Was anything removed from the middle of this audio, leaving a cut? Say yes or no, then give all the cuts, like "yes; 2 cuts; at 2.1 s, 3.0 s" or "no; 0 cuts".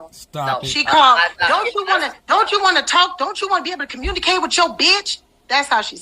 no; 0 cuts